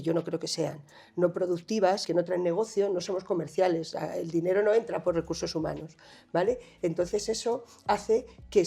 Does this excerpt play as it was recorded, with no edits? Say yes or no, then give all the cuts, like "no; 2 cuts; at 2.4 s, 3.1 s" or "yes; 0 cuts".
no; 1 cut; at 2.0 s